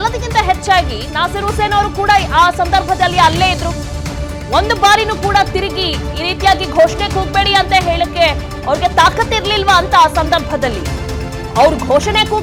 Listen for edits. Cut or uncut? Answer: uncut